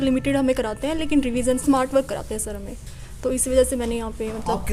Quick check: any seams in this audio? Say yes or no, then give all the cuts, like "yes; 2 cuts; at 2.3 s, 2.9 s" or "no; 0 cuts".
no; 0 cuts